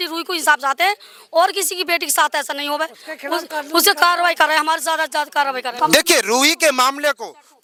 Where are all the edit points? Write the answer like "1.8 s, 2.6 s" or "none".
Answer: none